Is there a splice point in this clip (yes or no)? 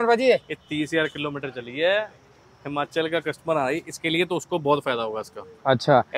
no